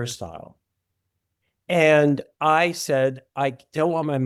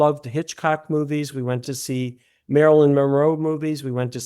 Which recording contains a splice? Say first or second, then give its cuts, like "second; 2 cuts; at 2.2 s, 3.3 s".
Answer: second; 1 cut; at 1.6 s